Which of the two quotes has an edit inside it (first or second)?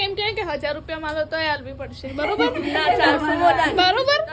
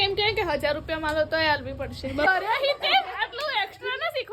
second